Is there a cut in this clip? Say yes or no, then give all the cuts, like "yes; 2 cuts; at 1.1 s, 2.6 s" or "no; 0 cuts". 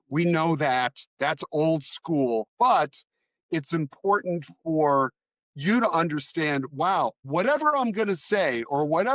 yes; 1 cut; at 2.5 s